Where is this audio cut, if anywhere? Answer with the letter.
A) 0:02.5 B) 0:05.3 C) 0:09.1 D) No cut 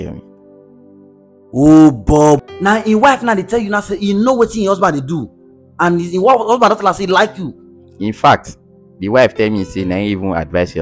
A